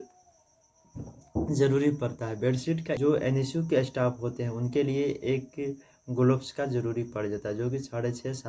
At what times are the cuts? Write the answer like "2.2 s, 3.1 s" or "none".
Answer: 3.0 s